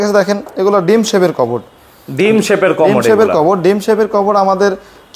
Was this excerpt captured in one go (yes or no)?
yes